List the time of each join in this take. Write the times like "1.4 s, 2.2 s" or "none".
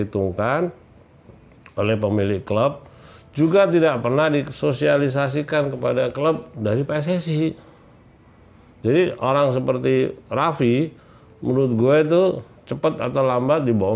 6.2 s